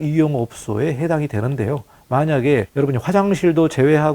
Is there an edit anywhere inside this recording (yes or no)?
yes